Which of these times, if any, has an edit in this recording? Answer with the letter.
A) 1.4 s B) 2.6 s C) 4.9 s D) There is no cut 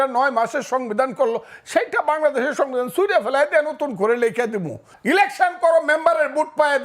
C